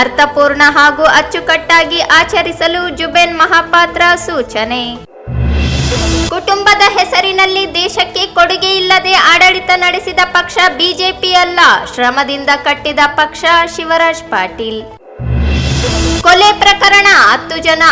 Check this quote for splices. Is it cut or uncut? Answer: uncut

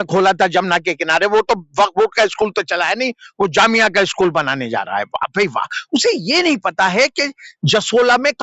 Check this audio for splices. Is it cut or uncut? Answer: uncut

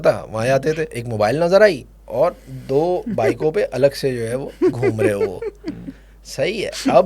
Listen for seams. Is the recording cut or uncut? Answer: cut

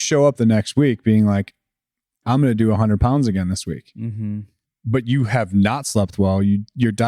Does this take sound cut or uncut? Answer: uncut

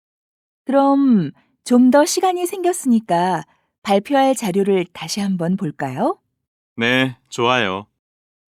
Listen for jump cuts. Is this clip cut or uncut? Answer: uncut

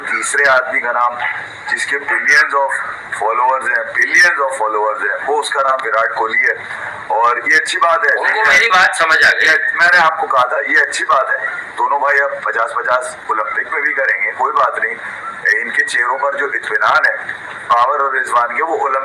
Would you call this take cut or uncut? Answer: uncut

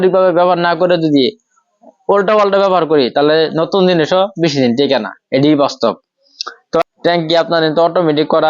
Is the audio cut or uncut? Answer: cut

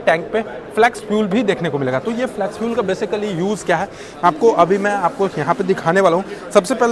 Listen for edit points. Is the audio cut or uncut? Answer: uncut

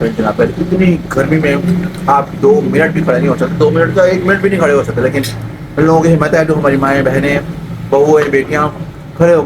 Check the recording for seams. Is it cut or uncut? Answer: uncut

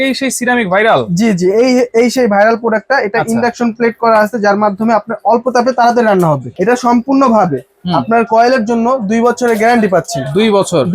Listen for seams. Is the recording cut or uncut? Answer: cut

